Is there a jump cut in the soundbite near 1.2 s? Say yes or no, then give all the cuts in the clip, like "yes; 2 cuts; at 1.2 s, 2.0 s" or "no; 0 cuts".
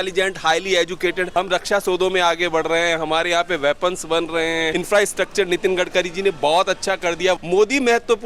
yes; 3 cuts; at 1.2 s, 4.7 s, 7.4 s